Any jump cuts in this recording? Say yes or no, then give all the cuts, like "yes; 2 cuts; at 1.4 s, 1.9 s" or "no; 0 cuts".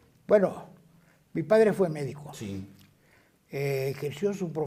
no; 0 cuts